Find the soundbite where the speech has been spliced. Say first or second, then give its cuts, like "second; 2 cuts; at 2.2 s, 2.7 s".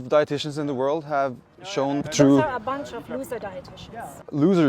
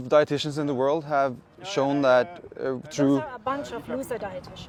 first; 1 cut; at 2.0 s